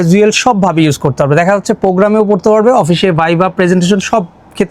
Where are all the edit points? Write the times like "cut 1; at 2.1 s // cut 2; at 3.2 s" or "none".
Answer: none